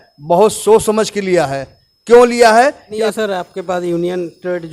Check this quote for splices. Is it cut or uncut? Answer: cut